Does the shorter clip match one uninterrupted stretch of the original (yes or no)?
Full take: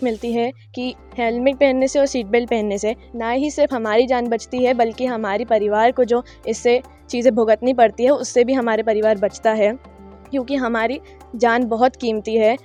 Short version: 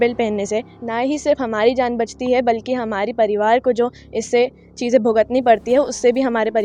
yes